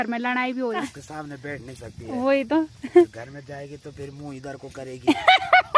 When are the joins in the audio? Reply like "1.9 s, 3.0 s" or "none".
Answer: 1.0 s